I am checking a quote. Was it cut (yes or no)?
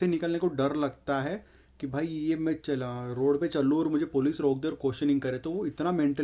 no